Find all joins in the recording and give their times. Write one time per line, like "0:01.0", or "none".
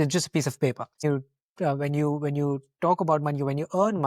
0:01.0